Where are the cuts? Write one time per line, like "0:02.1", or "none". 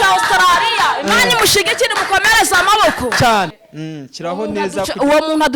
0:03.6